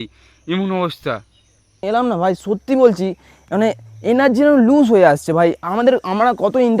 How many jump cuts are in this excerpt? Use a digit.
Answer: 1